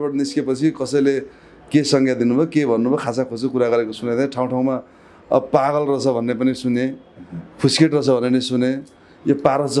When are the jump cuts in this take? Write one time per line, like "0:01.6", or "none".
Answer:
none